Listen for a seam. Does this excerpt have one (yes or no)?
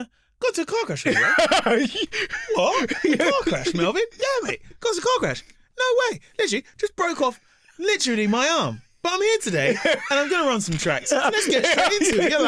no